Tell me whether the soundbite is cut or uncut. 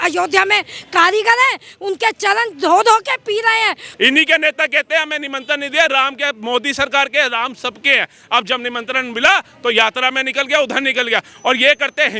cut